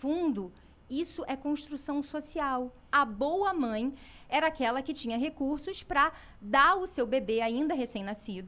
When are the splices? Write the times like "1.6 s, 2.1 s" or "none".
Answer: 2.8 s